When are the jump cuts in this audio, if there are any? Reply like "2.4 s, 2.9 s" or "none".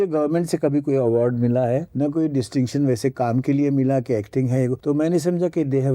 1.9 s, 4.8 s